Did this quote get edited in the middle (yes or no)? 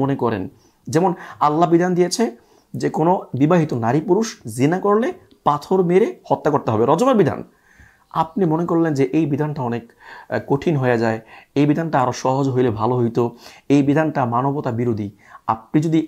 no